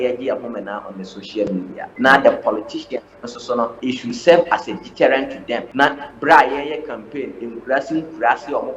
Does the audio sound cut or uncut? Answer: cut